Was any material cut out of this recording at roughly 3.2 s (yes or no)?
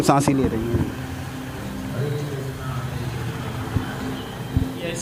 no